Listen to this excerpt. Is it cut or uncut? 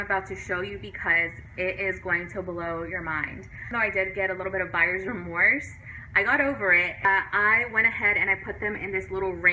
cut